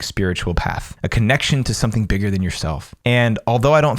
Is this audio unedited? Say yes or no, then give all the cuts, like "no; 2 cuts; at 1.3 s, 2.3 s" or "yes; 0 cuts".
no; 2 cuts; at 0.9 s, 2.9 s